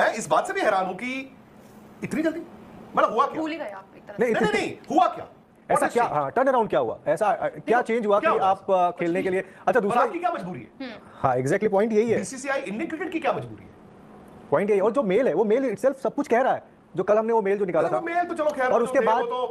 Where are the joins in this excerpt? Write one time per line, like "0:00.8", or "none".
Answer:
none